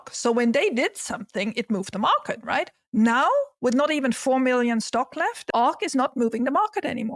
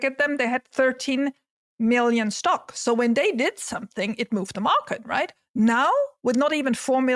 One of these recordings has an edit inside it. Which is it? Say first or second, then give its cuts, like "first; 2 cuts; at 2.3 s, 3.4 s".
first; 1 cut; at 5.4 s